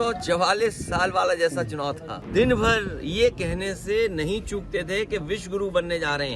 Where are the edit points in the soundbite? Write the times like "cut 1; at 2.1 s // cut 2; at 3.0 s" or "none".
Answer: cut 1; at 2.1 s